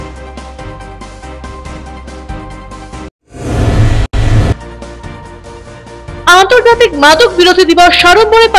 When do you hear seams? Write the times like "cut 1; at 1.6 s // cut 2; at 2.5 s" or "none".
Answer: none